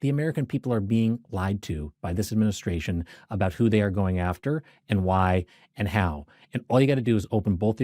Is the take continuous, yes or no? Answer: yes